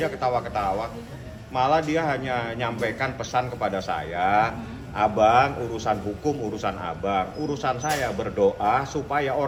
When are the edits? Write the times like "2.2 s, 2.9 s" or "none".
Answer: none